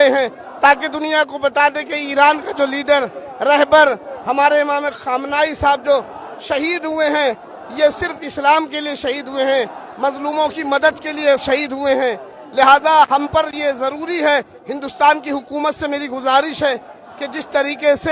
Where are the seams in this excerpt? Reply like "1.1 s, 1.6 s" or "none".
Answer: none